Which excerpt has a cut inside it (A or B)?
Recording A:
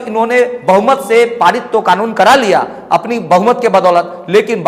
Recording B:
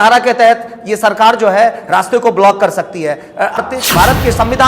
B